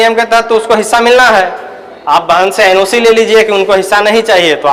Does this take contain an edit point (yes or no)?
no